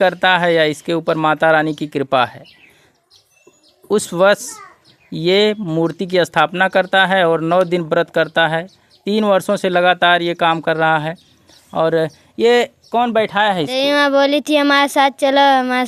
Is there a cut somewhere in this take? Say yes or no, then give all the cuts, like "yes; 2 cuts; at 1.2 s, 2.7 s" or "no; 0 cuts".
yes; 1 cut; at 13.8 s